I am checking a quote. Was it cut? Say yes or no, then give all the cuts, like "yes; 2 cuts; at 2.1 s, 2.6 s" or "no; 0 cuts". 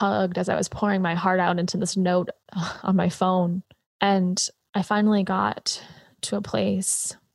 yes; 1 cut; at 3.8 s